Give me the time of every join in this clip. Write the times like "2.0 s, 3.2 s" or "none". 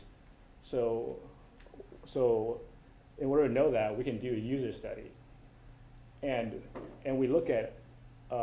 7.4 s

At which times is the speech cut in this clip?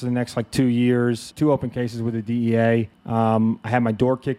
1.3 s, 3.0 s

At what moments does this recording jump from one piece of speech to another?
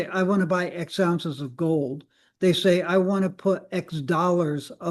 none

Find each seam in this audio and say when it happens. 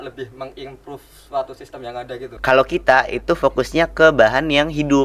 2.3 s

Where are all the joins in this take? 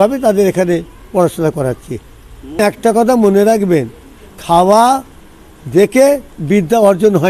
2.6 s

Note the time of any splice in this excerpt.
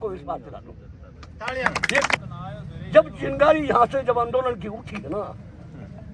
2.1 s

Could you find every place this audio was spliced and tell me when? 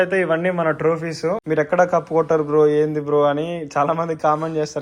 1.4 s

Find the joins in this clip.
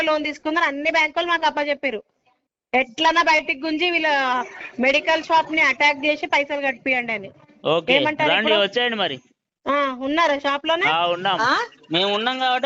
11.4 s

